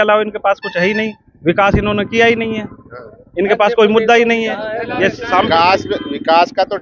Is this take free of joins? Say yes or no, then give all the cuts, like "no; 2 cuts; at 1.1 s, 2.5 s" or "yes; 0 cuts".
yes; 0 cuts